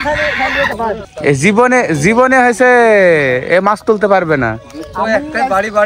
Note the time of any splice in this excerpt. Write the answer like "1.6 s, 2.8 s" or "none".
1.1 s